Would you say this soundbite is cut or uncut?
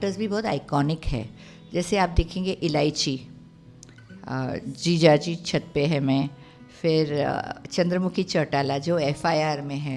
uncut